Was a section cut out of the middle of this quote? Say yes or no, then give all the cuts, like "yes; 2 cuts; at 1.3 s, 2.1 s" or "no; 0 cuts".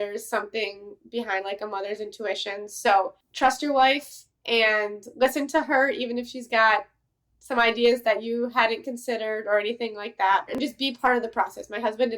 yes; 2 cuts; at 3.2 s, 10.5 s